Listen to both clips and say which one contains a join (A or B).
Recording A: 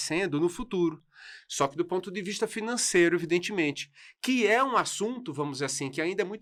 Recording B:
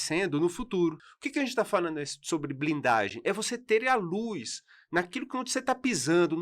B